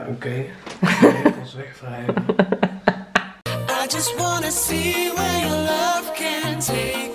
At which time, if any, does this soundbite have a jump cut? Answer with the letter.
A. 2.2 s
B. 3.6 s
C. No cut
B